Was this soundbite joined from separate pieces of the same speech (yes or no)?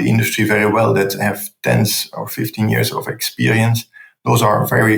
no